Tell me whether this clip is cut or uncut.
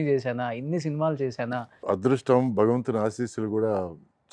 cut